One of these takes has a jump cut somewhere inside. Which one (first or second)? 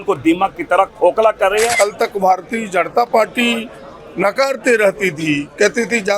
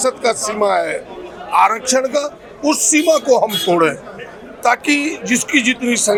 first